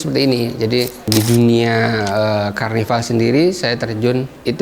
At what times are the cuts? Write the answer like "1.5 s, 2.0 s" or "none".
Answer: 1.1 s